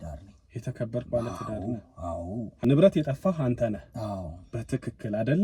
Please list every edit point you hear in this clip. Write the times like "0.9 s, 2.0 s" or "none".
2.6 s